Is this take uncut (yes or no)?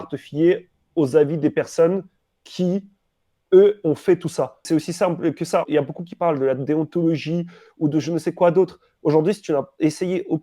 no